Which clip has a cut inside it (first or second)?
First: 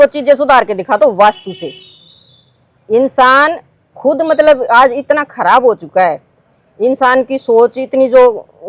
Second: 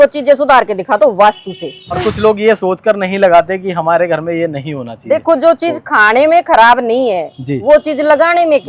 second